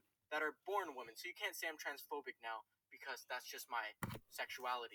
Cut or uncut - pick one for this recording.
uncut